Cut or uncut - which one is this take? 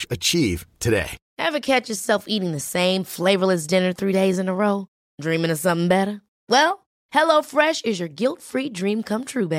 cut